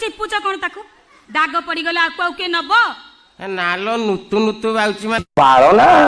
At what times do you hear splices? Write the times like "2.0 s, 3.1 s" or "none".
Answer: 5.2 s

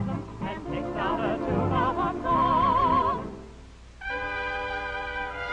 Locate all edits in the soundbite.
1.4 s

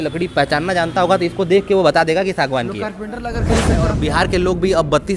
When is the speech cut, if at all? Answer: 3.8 s

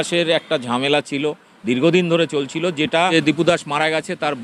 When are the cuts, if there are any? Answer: 3.1 s

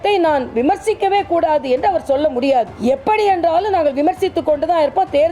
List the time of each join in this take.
2.7 s

